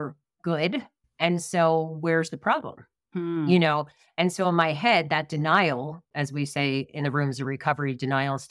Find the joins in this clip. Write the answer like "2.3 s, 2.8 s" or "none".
none